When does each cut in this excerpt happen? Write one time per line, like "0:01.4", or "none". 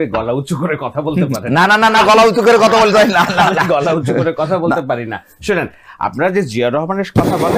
none

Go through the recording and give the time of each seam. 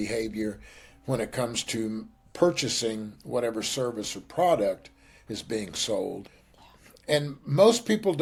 none

